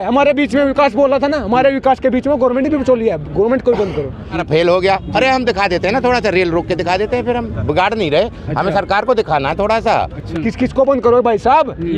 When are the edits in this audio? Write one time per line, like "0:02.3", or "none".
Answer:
0:04.3
0:10.2